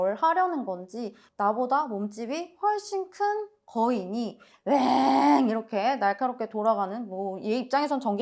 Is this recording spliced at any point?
yes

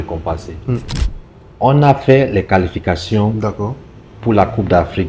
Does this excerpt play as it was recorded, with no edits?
no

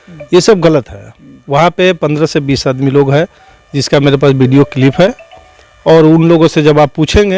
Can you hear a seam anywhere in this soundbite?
no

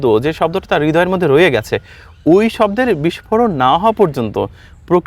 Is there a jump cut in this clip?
no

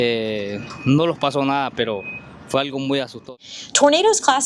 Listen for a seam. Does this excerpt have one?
yes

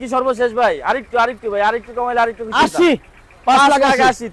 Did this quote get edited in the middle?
no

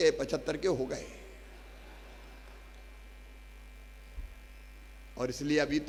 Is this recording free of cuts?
yes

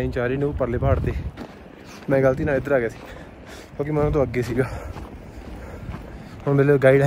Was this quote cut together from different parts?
no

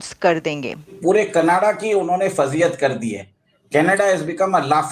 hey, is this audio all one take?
no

